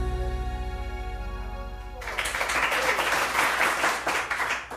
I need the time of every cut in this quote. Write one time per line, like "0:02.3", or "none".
0:01.9